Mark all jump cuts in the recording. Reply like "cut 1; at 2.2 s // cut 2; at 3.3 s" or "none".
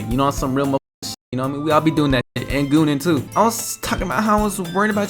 cut 1; at 3.3 s